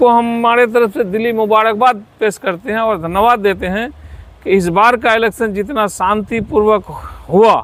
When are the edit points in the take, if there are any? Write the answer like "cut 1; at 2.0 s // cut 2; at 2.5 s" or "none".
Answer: none